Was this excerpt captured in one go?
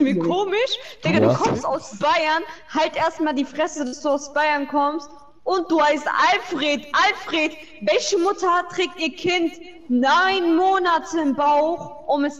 yes; 0 cuts

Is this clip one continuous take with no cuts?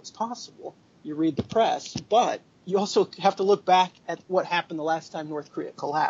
no; 1 cut; at 4.1 s

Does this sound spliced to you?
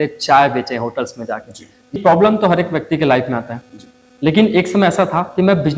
yes; 1 cut; at 1.9 s

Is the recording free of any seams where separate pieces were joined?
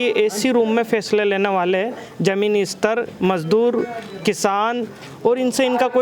yes; 0 cuts

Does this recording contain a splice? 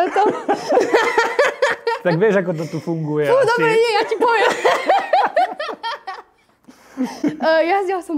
no; 0 cuts

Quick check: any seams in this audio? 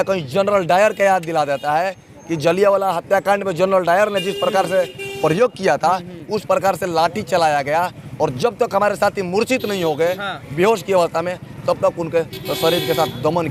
no; 0 cuts

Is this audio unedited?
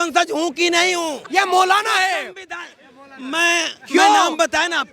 no; 1 cut; at 1.2 s

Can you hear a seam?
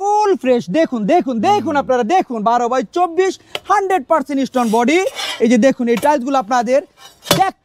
no; 0 cuts

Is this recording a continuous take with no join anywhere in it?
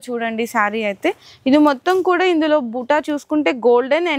yes; 0 cuts

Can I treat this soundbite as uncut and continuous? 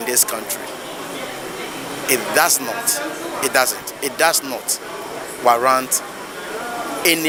yes; 0 cuts

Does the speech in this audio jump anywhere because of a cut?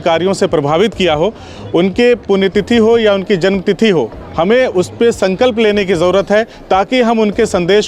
no; 0 cuts

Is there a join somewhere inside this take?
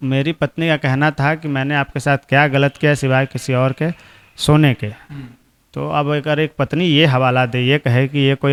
no; 0 cuts

